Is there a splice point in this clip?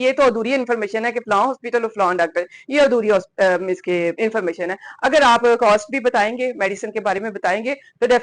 no; 0 cuts

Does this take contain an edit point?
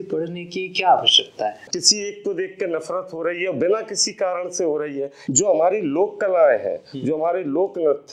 yes; 2 cuts; at 1.6 s, 5.2 s

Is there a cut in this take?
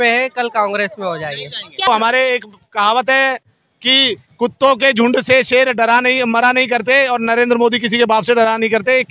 yes; 1 cut; at 1.9 s

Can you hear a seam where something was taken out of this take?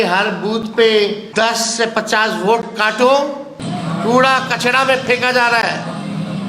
yes; 2 cuts; at 1.2 s, 3.6 s

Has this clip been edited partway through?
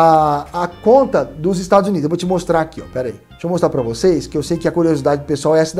yes; 1 cut; at 3.3 s

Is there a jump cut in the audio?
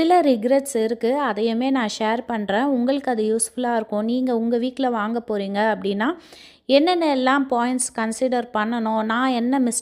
no; 0 cuts

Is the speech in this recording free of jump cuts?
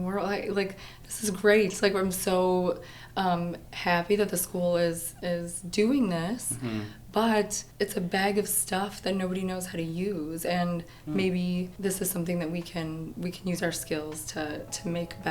no; 3 cuts; at 7.6 s, 11.7 s, 13.1 s

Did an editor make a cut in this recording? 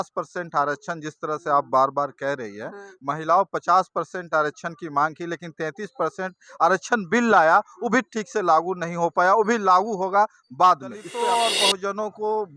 yes; 1 cut; at 11.0 s

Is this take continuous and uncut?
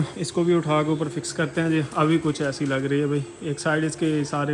yes; 0 cuts

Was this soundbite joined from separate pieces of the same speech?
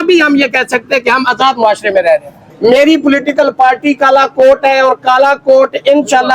yes; 1 cut; at 2.5 s

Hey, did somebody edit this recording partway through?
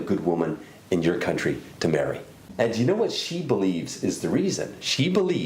yes; 1 cut; at 2.4 s

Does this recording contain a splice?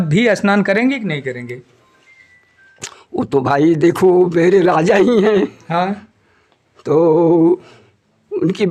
no; 0 cuts

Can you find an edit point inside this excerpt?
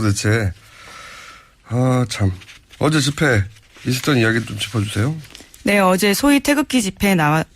yes; 1 cut; at 5.1 s

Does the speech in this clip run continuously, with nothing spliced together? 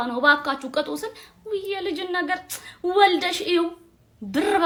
yes; 0 cuts

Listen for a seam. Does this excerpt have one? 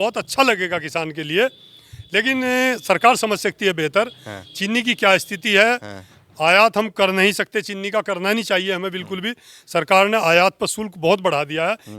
no; 0 cuts

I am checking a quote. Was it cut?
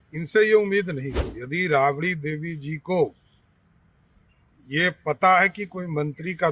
yes; 1 cut; at 1.3 s

